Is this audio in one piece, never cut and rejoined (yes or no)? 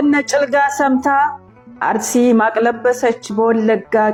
yes